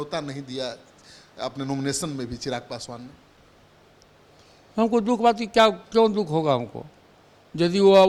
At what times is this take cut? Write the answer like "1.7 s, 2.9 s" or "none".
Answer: none